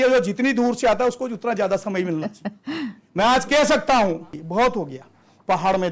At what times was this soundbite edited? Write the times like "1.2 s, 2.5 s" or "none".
4.4 s